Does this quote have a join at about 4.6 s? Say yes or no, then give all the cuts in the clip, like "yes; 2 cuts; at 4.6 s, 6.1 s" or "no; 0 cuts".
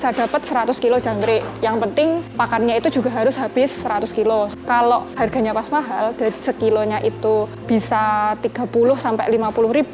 yes; 1 cut; at 4.6 s